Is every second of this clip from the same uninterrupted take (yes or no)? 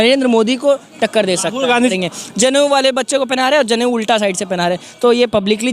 no